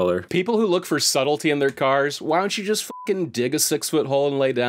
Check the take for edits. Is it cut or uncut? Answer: uncut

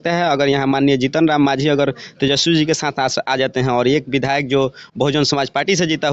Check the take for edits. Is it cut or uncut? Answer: uncut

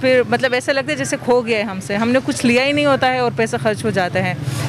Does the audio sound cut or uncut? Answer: uncut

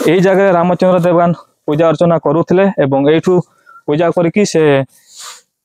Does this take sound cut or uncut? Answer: uncut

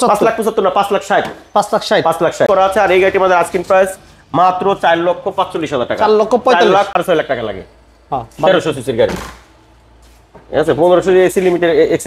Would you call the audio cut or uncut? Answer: cut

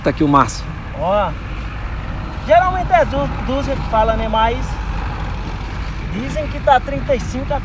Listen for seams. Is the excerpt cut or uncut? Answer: uncut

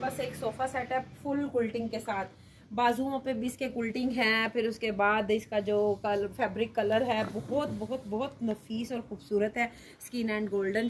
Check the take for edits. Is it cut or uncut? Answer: uncut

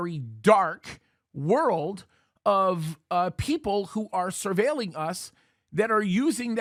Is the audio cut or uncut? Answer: uncut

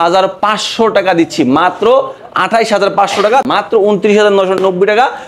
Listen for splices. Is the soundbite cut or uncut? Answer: cut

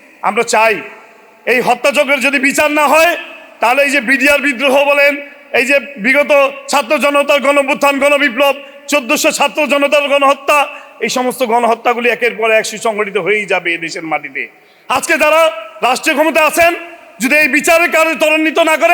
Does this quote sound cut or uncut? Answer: uncut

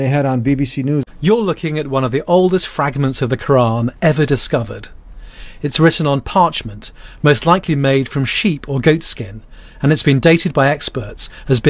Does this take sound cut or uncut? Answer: cut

